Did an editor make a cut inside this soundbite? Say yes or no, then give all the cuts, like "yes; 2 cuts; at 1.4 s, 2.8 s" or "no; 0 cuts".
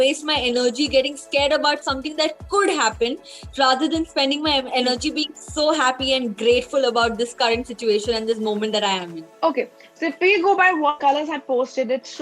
no; 0 cuts